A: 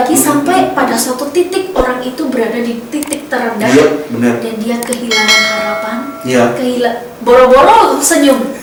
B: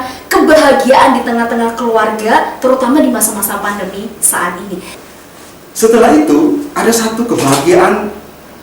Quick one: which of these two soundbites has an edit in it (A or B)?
B